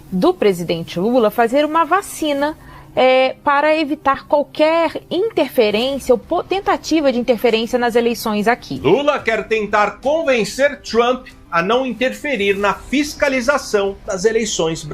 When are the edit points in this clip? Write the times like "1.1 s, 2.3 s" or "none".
8.7 s